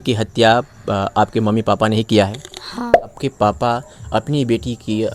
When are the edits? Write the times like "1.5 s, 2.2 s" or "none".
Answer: 3.1 s